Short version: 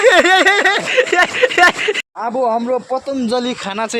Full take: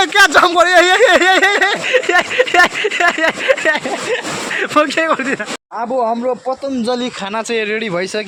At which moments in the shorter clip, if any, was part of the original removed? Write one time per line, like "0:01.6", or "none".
0:02.0